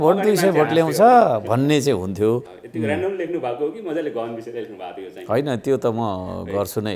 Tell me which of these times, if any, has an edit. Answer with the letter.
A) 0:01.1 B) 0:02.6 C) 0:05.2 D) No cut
B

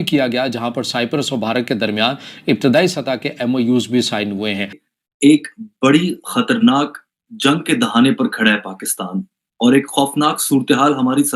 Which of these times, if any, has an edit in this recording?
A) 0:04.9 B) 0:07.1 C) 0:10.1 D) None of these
A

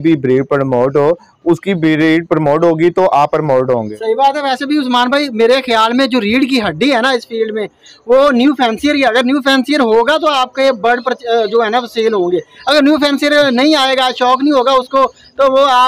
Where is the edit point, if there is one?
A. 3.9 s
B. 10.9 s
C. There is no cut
A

